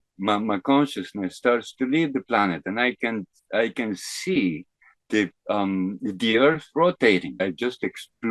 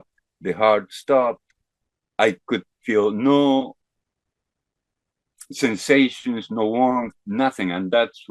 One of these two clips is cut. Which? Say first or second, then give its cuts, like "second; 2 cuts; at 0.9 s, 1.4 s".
first; 1 cut; at 7.4 s